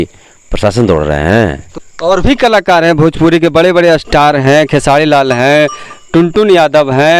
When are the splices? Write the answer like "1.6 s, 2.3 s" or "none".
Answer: 1.7 s

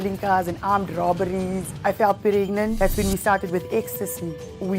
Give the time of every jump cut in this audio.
2.7 s

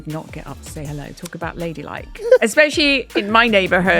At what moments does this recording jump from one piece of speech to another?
2.2 s

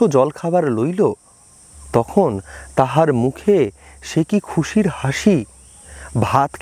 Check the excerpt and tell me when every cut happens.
none

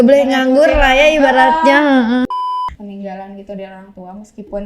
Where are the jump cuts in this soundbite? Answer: 2.6 s

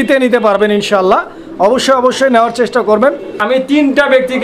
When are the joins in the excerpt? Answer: 3.3 s

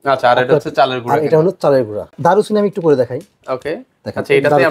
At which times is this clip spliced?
2.2 s

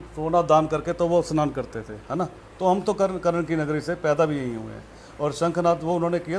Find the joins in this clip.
none

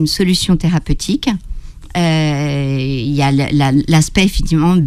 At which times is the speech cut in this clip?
none

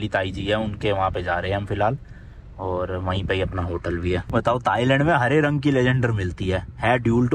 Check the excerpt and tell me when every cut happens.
4.2 s

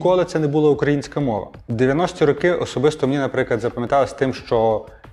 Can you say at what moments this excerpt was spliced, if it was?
1.6 s

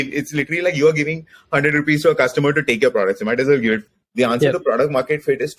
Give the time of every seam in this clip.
4.0 s

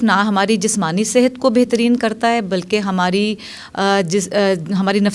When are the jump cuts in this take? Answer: none

